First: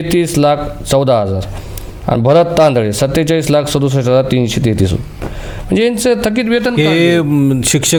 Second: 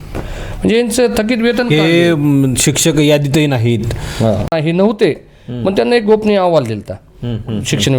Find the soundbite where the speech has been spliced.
second; 1 cut; at 4.5 s

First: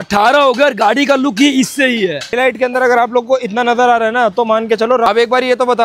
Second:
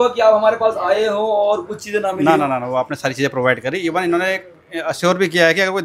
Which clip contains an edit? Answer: first; 2 cuts; at 2.4 s, 5.1 s

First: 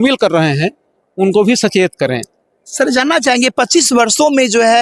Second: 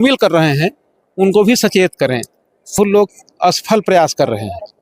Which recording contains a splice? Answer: second; 1 cut; at 2.8 s

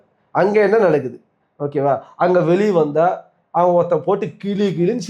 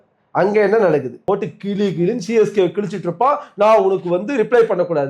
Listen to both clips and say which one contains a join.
second; 1 cut; at 1.2 s

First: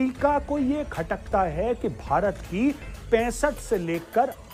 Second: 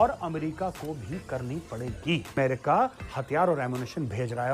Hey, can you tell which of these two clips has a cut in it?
second; 1 cut; at 2.3 s

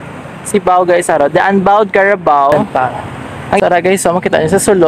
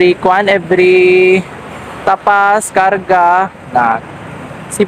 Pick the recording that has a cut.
first; 1 cut; at 2.5 s

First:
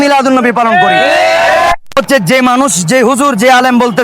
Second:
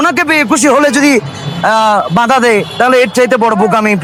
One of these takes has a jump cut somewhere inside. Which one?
first; 1 cut; at 2.0 s

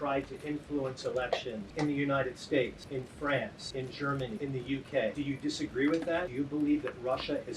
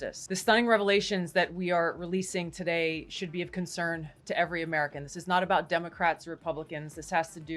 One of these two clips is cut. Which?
first; 5 cuts; at 1.6 s, 2.8 s, 4.0 s, 5.1 s, 6.3 s

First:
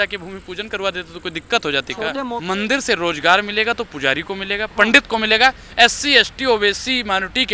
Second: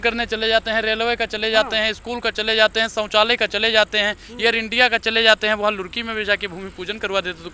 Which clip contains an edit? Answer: first; 1 cut; at 2.2 s

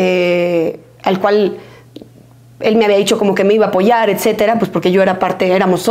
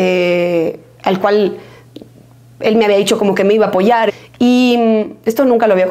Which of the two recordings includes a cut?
second; 1 cut; at 4.1 s

